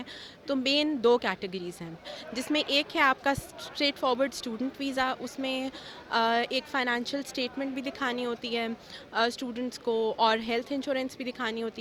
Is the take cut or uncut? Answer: uncut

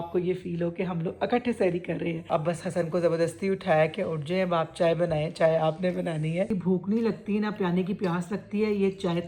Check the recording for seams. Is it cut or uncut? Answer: cut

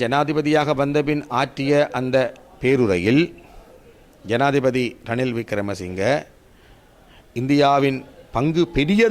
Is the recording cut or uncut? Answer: uncut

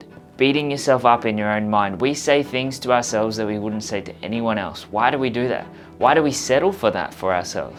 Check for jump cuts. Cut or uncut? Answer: uncut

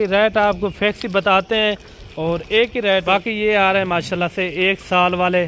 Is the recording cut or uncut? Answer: cut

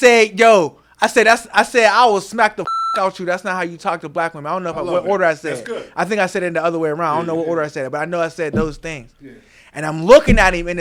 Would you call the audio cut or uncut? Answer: uncut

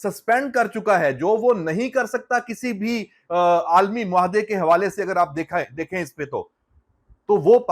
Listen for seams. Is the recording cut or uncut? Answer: uncut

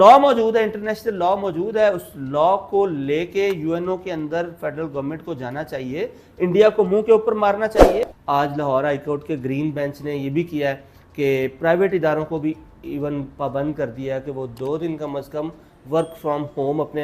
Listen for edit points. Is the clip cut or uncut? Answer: cut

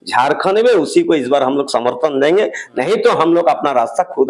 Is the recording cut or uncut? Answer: uncut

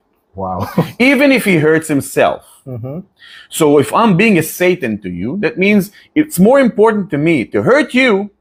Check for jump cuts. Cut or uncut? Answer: uncut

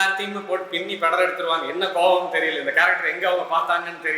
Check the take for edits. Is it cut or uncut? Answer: uncut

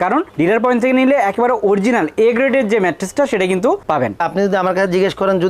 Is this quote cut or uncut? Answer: cut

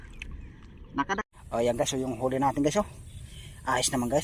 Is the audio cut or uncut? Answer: cut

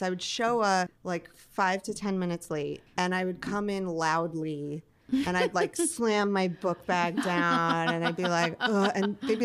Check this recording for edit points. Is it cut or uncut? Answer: cut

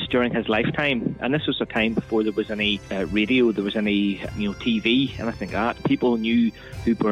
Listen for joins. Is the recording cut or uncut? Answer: cut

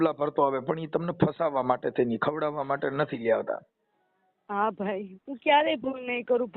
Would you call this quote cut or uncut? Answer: uncut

